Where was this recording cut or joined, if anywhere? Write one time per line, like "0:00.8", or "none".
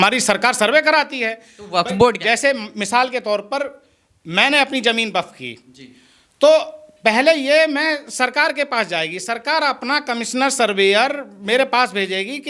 none

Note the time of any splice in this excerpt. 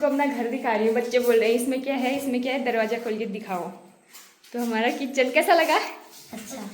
none

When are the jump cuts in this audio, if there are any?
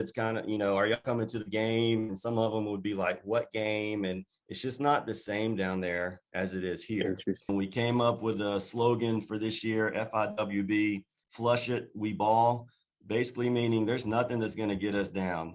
0:07.5

